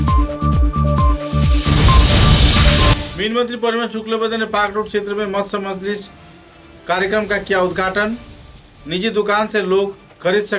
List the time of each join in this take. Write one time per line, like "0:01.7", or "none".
0:03.0

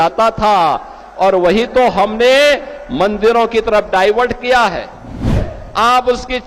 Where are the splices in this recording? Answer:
0:05.6

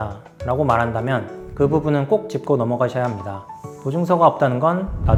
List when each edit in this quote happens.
none

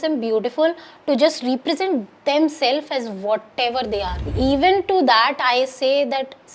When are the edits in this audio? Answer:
0:04.2

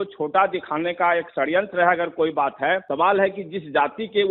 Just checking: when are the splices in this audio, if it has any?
0:02.9

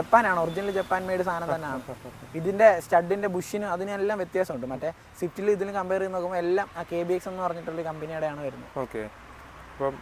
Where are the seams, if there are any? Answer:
none

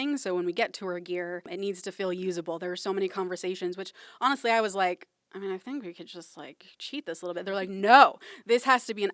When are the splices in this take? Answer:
0:01.5

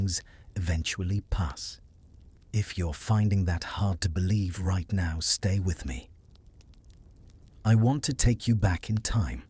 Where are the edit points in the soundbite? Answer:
none

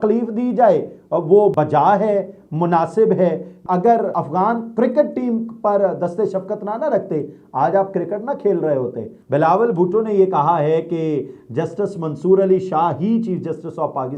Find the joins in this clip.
0:03.6
0:09.1

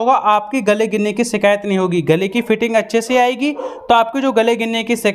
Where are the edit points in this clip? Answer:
none

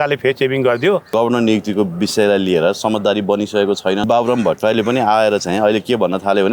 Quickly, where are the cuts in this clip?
0:01.1
0:04.0

